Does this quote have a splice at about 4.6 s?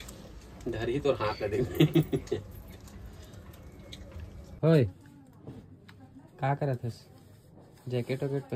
yes; 1 cut; at 4.6 s

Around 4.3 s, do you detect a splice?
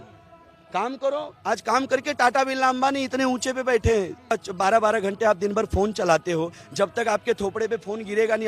yes; 1 cut; at 4.3 s

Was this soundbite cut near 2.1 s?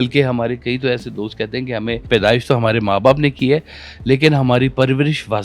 yes; 1 cut; at 2.1 s

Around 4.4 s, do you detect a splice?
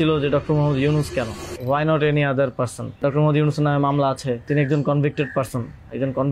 yes; 3 cuts; at 1.5 s, 3.0 s, 4.4 s

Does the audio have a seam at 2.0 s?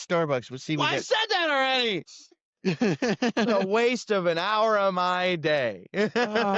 yes; 1 cut; at 2.0 s

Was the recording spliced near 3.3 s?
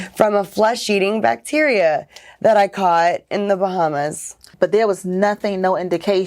no; 1 cut; at 4.5 s

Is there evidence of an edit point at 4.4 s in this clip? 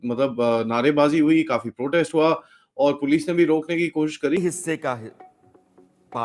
yes; 1 cut; at 4.4 s

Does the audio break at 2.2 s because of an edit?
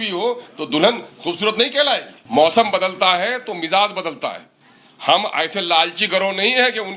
yes; 1 cut; at 2.2 s

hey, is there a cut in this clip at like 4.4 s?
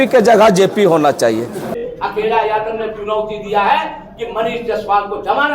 no; 1 cut; at 1.8 s

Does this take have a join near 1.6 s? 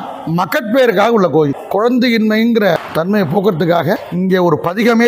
yes; 3 cuts; at 1.6 s, 2.8 s, 4.1 s

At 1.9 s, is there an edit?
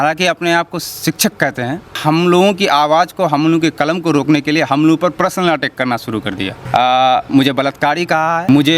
yes; 2 cuts; at 1.9 s, 6.5 s

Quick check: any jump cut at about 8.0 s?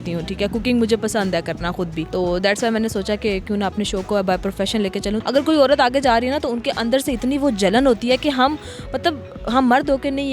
no; 2 cuts; at 2.0 s, 5.2 s

